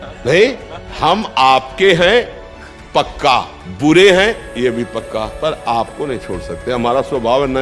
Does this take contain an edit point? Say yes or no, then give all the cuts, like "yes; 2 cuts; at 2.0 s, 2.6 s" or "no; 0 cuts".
yes; 2 cuts; at 3.6 s, 5.3 s